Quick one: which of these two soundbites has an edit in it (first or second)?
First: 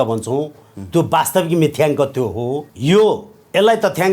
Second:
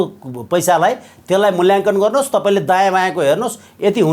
first